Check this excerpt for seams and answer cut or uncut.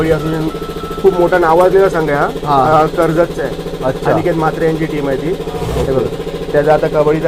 uncut